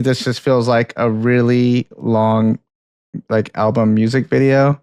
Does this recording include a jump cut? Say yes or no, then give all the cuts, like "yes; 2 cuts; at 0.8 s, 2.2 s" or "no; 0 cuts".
no; 0 cuts